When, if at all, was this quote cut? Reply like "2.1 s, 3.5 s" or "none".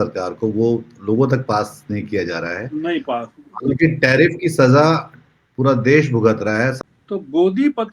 6.9 s